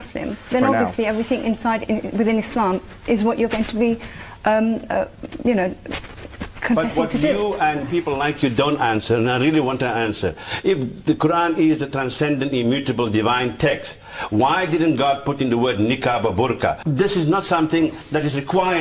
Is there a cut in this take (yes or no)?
yes